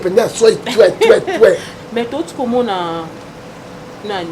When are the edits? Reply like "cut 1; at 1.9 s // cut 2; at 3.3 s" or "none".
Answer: cut 1; at 1.7 s